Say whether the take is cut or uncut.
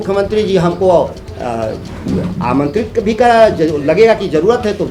uncut